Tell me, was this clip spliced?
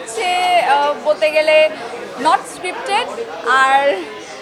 no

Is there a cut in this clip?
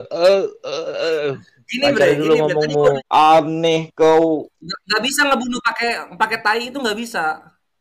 yes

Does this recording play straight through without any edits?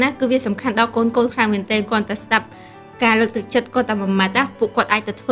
yes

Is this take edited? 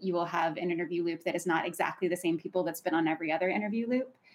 no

